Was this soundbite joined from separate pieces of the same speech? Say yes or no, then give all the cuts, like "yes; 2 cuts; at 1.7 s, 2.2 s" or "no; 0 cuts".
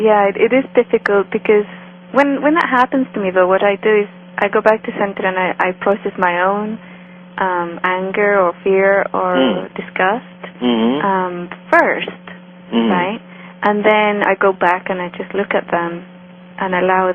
no; 0 cuts